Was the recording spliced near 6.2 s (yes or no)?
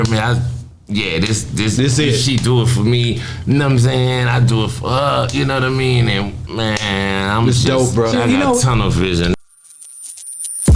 no